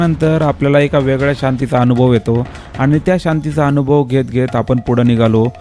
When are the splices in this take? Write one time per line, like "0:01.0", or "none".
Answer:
none